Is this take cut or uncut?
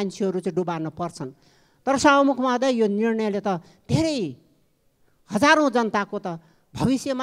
uncut